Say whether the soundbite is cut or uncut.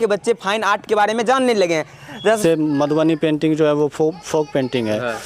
cut